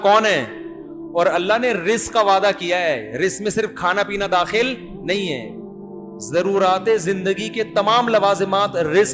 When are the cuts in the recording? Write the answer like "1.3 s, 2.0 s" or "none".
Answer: none